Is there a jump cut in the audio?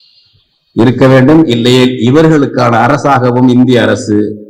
no; 0 cuts

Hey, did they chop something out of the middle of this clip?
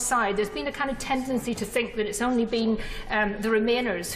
yes; 1 cut; at 2.1 s

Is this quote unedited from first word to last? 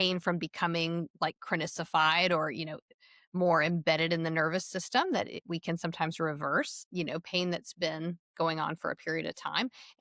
yes; 0 cuts

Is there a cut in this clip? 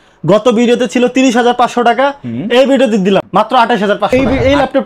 yes; 2 cuts; at 3.3 s, 4.1 s

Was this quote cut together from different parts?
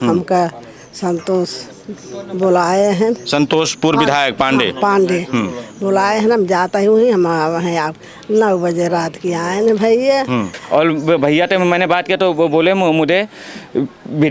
yes; 1 cut; at 10.6 s

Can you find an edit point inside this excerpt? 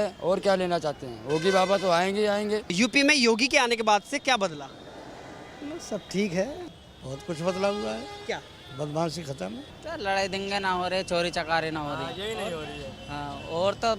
yes; 3 cuts; at 2.7 s, 6.6 s, 9.7 s

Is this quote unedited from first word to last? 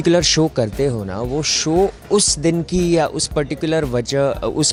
yes; 0 cuts

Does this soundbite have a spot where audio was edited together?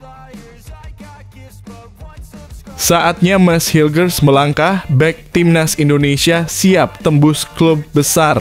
yes; 1 cut; at 2.8 s

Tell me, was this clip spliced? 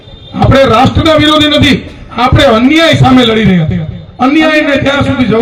no; 0 cuts

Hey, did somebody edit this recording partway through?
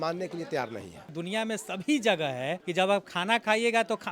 yes; 2 cuts; at 1.2 s, 2.6 s

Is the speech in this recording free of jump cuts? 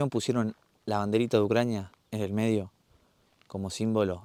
yes; 0 cuts

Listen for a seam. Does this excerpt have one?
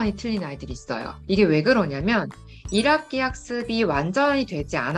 yes; 1 cut; at 1.1 s

